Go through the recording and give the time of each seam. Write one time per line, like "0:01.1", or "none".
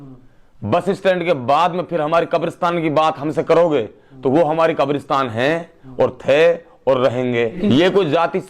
0:07.6